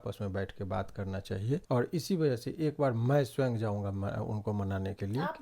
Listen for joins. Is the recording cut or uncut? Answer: cut